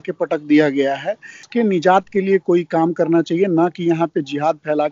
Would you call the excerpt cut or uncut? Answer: cut